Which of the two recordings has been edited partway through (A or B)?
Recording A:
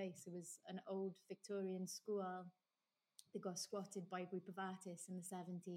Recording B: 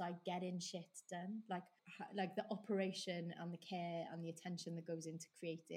B